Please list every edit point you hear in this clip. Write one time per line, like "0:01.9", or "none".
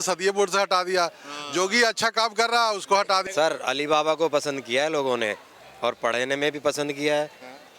0:03.2